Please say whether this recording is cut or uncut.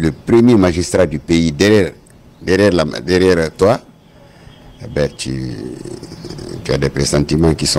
uncut